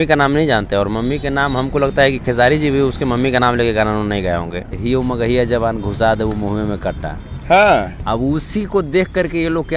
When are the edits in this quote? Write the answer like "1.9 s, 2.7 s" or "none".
4.7 s